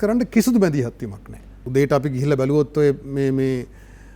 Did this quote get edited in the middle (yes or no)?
yes